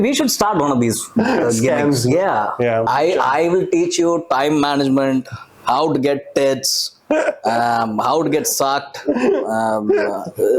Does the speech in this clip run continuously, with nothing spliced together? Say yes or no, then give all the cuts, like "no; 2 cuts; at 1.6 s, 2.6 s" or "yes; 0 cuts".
no; 1 cut; at 2.9 s